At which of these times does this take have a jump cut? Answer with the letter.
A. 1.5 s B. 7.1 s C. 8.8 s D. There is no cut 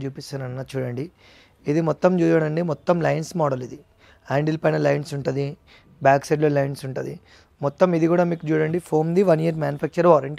D